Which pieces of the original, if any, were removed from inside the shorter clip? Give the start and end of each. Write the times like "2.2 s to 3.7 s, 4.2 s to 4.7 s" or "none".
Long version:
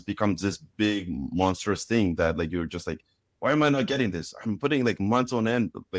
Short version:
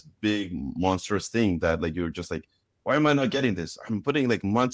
none